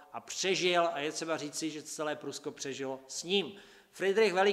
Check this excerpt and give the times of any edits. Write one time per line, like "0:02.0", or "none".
0:01.8